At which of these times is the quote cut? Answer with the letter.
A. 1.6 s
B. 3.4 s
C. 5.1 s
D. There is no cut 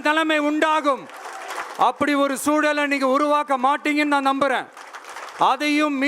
A